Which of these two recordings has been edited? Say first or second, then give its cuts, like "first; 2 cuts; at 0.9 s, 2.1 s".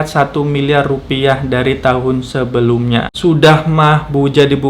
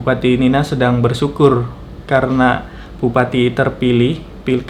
first; 1 cut; at 3.1 s